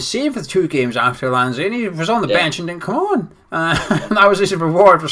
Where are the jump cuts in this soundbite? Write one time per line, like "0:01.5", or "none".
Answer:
none